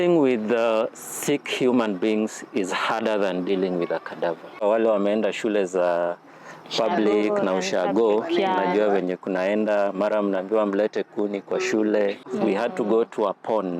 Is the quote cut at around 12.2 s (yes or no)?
yes